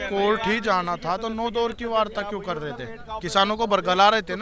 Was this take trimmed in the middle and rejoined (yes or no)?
no